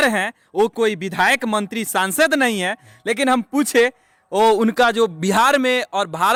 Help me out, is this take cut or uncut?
uncut